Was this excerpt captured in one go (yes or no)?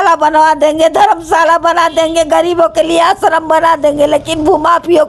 yes